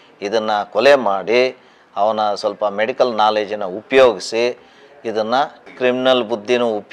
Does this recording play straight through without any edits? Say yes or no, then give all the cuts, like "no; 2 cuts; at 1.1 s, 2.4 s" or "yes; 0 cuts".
yes; 0 cuts